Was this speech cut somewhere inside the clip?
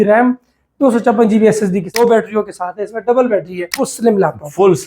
yes; 2 cuts; at 1.9 s, 3.9 s

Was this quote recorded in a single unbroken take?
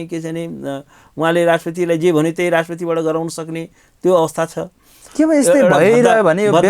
no; 1 cut; at 5.0 s

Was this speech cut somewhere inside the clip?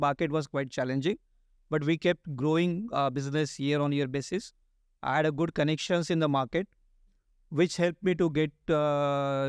no; 0 cuts

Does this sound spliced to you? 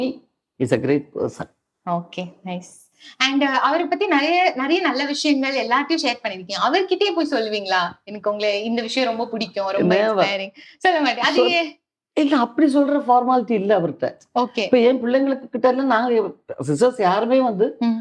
no; 0 cuts

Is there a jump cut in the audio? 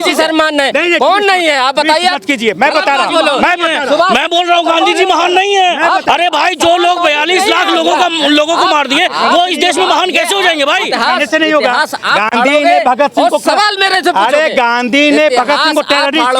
no; 0 cuts

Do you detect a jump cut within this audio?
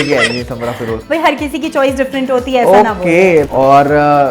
yes; 2 cuts; at 0.9 s, 3.5 s

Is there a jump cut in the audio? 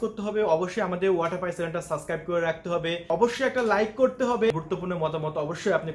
yes; 2 cuts; at 3.1 s, 4.5 s

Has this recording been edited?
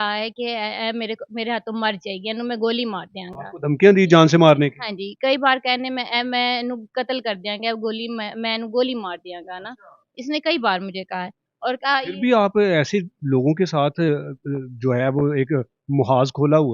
no; 0 cuts

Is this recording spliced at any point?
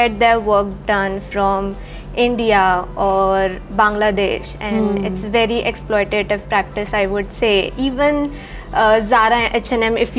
no; 0 cuts

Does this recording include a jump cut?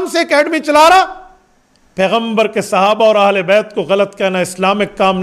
no; 0 cuts

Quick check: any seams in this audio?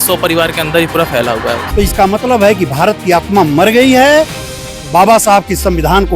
yes; 1 cut; at 1.6 s

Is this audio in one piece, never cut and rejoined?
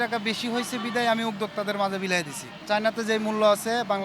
no; 1 cut; at 2.5 s

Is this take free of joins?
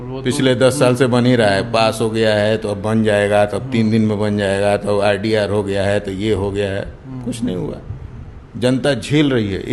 yes; 0 cuts

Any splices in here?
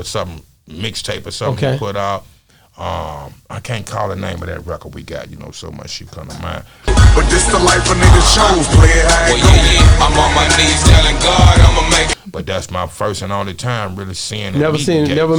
no; 0 cuts

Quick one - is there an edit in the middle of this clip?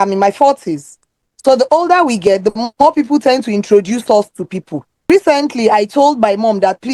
yes; 1 cut; at 5.1 s

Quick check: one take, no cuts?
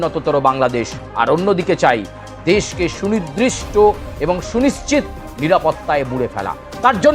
no; 1 cut; at 1.0 s

